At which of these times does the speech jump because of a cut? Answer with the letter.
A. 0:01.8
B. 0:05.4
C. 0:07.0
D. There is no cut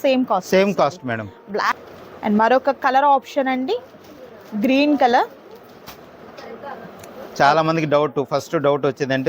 A